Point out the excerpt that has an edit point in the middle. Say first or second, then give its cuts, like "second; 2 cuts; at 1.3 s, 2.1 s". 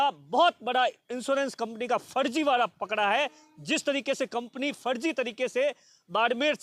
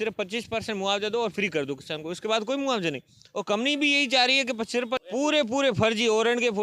second; 1 cut; at 5.0 s